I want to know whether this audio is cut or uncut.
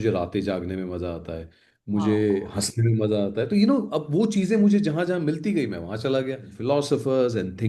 cut